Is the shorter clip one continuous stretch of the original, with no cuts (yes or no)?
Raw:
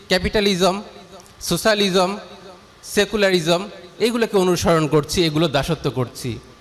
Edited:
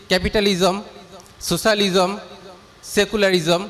yes